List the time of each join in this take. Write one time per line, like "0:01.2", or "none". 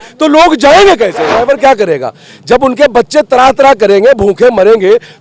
0:01.3

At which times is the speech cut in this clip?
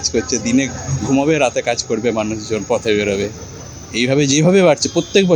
none

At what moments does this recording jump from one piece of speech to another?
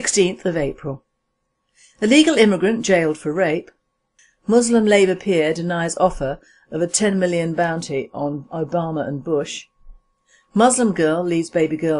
none

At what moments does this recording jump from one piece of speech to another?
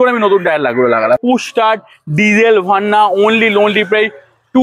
0:01.2

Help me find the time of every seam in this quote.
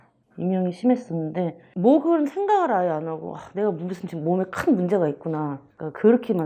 none

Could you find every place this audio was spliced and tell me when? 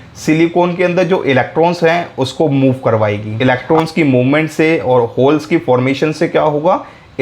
0:03.3

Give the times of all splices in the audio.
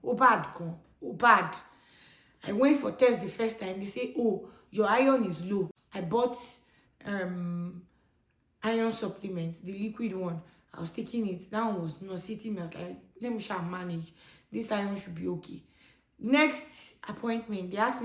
0:05.8

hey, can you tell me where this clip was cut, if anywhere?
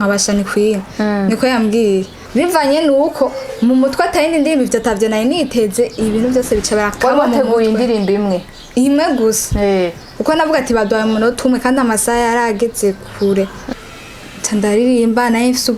0:02.2
0:13.6

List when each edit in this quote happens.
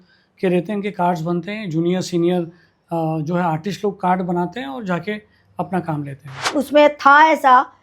0:06.4

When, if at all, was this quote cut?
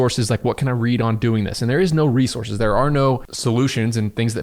0:03.3

